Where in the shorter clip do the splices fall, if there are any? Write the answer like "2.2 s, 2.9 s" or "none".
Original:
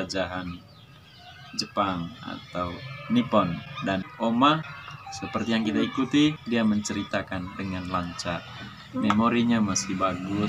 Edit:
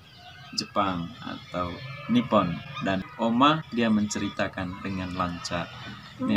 3.7 s